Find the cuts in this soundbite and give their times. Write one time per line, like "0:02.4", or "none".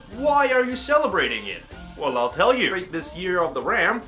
none